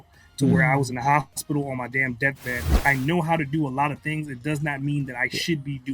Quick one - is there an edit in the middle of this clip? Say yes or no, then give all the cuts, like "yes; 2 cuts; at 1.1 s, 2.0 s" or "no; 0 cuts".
yes; 1 cut; at 2.7 s